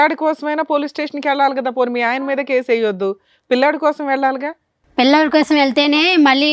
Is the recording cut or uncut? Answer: uncut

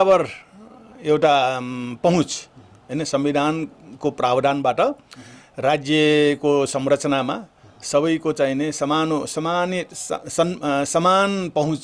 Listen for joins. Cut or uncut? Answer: uncut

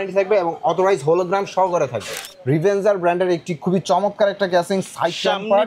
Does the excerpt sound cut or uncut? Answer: cut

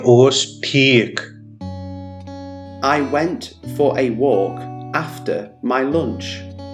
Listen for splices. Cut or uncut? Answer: uncut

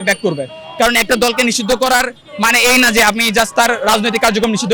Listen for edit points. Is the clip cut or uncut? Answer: uncut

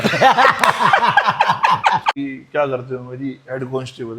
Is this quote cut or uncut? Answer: cut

